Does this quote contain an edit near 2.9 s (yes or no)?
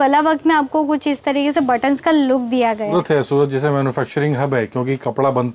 yes